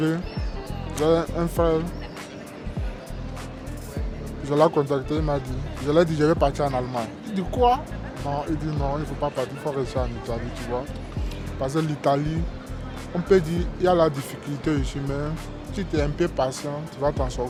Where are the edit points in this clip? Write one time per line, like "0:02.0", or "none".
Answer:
none